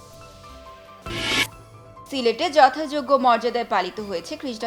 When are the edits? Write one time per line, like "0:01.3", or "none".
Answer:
0:00.9